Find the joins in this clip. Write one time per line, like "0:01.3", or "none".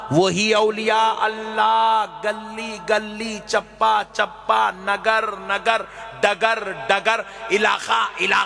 none